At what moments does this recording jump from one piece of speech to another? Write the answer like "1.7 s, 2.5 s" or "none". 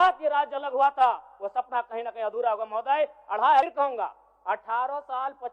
3.7 s